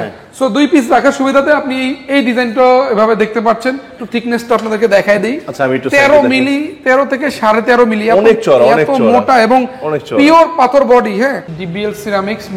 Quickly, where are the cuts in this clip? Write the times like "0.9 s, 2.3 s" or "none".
3.9 s, 11.5 s